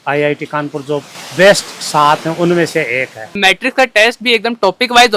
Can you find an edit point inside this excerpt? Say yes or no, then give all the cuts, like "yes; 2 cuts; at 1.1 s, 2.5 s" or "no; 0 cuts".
yes; 1 cut; at 3.4 s